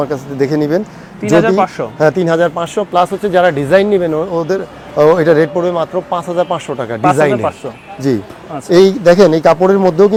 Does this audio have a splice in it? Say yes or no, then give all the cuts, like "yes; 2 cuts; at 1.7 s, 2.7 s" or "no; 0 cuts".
no; 0 cuts